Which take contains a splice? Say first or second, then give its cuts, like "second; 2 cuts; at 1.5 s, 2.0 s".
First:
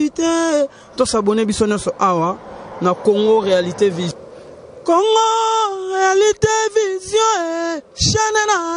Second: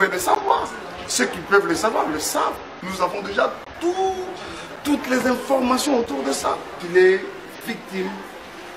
second; 1 cut; at 6.7 s